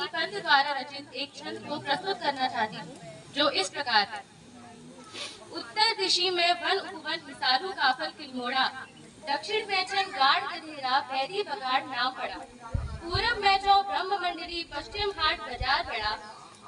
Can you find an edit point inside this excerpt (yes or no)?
no